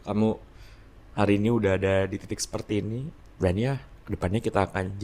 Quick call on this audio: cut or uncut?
cut